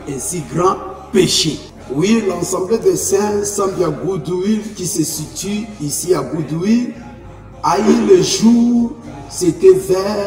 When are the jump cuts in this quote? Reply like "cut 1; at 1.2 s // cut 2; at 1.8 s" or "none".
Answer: cut 1; at 1.7 s